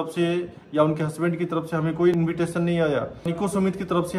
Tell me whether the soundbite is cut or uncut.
cut